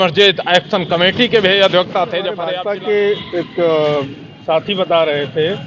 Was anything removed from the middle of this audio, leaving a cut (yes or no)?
yes